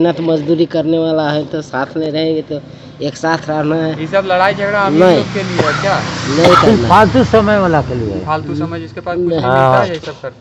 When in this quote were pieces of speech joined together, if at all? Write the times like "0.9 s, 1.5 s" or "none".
none